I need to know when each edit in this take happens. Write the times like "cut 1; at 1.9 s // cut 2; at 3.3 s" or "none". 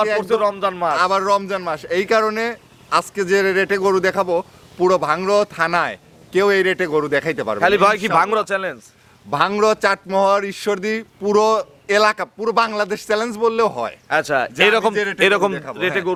none